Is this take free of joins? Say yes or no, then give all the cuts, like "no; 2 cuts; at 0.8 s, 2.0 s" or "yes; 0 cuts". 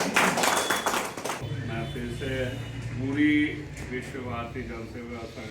no; 1 cut; at 1.5 s